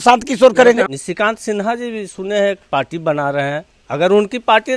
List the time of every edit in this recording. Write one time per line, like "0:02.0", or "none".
0:00.9
0:03.7